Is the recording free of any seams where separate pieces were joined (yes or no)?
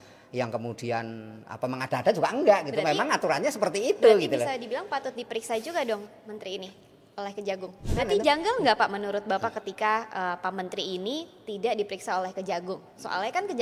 no